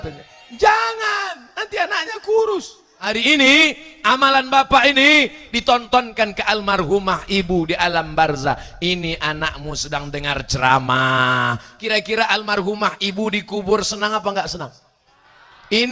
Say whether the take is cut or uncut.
cut